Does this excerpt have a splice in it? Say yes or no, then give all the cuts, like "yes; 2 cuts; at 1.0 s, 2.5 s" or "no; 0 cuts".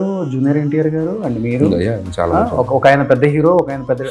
no; 0 cuts